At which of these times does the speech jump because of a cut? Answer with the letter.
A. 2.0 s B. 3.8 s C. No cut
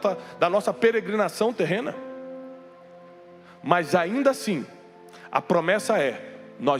C